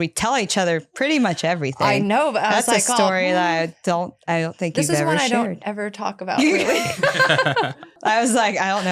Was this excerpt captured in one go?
no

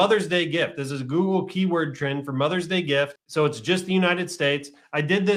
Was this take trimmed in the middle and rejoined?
yes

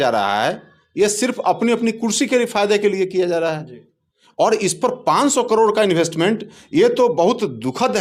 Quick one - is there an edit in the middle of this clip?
no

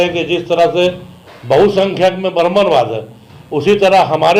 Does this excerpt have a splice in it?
no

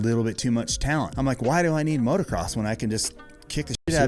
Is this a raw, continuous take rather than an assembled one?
no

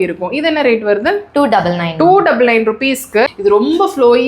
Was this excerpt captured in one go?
no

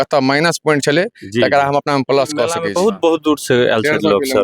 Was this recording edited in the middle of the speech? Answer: yes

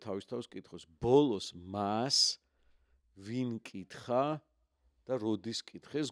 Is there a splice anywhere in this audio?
no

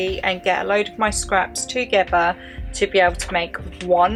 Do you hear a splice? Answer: no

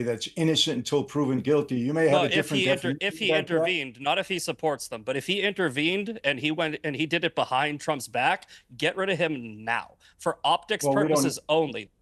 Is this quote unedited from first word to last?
yes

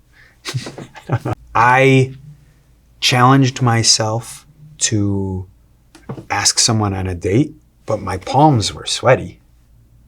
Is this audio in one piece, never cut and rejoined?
no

